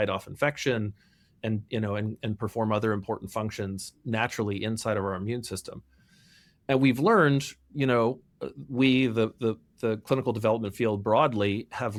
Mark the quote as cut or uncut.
uncut